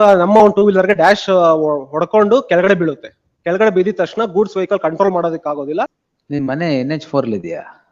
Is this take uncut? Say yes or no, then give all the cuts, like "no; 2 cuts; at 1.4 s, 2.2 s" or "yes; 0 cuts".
no; 1 cut; at 6.1 s